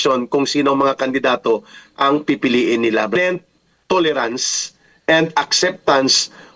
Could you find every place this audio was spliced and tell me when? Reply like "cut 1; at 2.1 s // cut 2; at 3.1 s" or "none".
cut 1; at 3.1 s